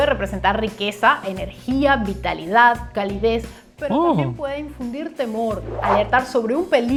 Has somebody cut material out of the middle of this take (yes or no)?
no